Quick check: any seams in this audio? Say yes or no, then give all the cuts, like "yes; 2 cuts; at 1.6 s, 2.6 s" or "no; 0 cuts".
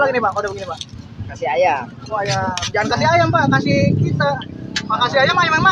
no; 0 cuts